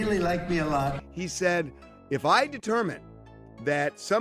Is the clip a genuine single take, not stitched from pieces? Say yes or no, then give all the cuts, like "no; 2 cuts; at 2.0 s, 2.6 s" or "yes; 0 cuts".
no; 1 cut; at 1.0 s